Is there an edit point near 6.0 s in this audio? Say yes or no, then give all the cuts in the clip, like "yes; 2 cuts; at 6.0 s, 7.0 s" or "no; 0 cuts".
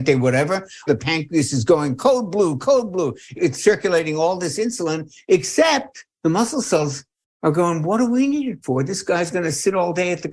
yes; 3 cuts; at 0.8 s, 3.3 s, 6.0 s